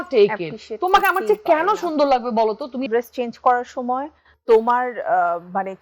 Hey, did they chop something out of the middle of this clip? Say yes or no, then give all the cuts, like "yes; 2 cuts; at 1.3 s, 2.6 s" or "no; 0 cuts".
yes; 1 cut; at 2.8 s